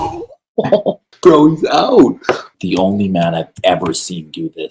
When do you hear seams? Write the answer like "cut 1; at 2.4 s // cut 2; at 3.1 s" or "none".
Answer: cut 1; at 1.1 s // cut 2; at 2.5 s